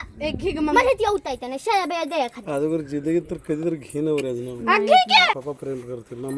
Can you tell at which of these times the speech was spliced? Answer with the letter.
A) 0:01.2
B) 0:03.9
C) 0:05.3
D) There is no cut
C